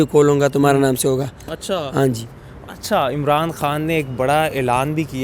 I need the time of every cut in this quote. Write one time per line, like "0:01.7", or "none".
none

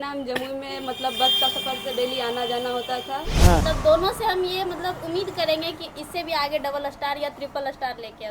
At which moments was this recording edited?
0:03.6

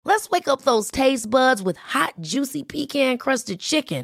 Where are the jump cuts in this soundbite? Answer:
none

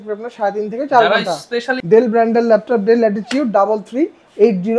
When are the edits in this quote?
0:01.8

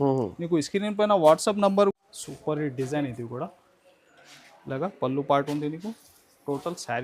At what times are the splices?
0:01.9

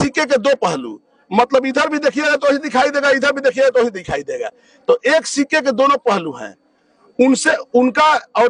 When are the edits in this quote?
none

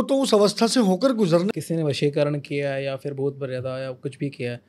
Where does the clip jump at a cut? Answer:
0:01.5

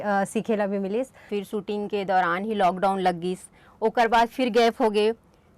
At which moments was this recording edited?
0:01.2

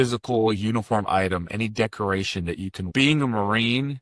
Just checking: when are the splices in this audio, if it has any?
0:02.8

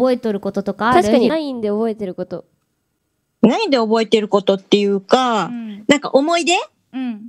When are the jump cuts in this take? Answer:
0:01.3

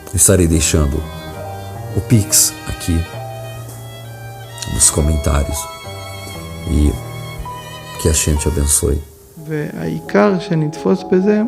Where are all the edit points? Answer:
0:09.5

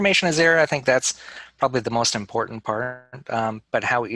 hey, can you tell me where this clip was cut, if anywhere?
none

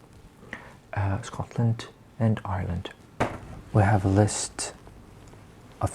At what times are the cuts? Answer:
0:03.2

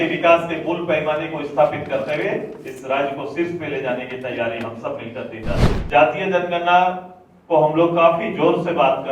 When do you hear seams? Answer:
0:05.7

